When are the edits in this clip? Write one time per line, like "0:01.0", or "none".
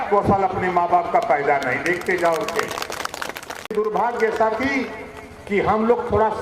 0:03.7